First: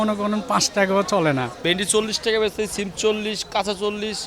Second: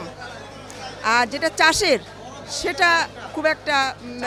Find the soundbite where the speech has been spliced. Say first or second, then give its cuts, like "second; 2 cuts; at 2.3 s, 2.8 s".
first; 1 cut; at 1.5 s